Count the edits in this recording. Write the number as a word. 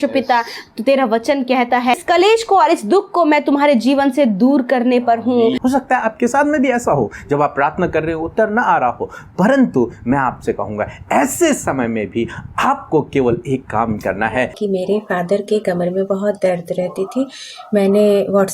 three